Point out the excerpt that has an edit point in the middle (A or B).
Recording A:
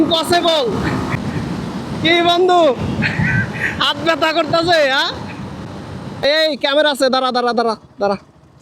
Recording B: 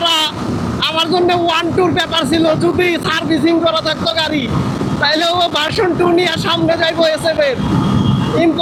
A